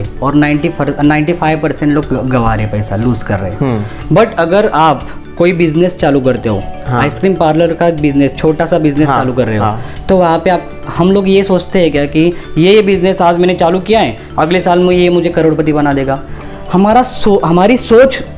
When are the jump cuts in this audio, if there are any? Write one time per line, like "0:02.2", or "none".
0:03.9